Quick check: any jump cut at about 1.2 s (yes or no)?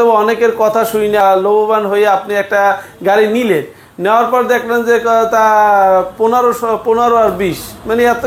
yes